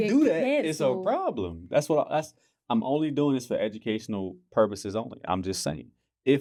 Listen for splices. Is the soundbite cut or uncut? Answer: uncut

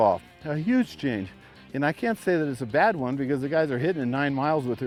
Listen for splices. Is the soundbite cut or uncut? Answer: uncut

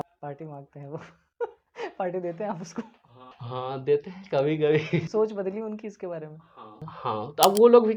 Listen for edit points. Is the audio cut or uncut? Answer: uncut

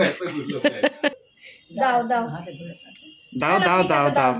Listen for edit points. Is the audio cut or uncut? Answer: cut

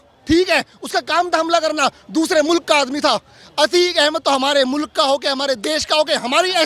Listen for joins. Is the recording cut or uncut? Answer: uncut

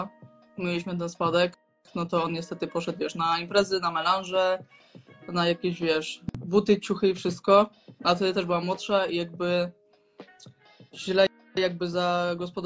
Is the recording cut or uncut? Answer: uncut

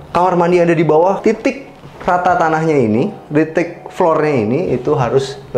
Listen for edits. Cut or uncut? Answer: cut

